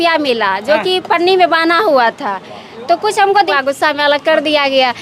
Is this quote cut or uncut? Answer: cut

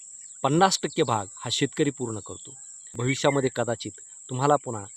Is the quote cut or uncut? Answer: cut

